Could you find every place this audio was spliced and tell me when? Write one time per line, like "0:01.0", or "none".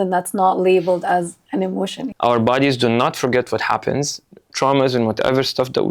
0:02.0